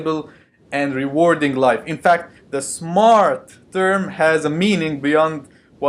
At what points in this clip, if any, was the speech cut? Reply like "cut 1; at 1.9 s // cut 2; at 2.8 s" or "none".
cut 1; at 4.9 s

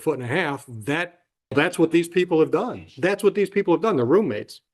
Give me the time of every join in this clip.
cut 1; at 1.5 s

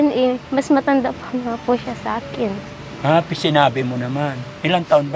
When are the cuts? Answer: none

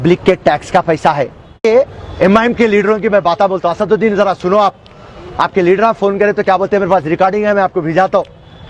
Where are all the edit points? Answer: cut 1; at 1.6 s

